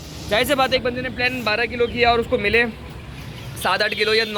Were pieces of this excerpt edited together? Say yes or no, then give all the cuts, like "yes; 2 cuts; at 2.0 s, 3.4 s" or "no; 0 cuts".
no; 0 cuts